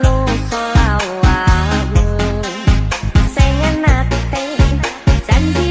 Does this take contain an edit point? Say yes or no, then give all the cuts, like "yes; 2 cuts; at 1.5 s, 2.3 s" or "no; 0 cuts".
no; 0 cuts